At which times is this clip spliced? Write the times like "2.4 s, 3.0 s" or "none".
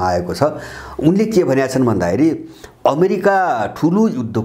none